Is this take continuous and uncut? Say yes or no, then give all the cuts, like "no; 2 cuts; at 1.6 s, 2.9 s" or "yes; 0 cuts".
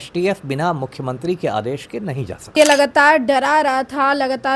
no; 1 cut; at 2.6 s